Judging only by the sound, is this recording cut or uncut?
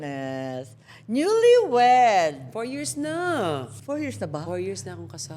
cut